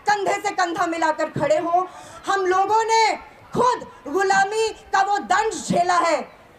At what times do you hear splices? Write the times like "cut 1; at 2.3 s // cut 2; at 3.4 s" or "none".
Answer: none